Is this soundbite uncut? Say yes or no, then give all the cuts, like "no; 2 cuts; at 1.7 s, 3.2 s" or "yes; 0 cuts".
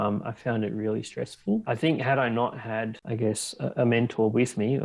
no; 2 cuts; at 1.6 s, 3.0 s